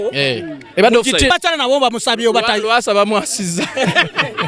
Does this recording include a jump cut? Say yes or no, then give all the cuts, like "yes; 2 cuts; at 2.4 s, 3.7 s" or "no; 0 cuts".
yes; 1 cut; at 1.3 s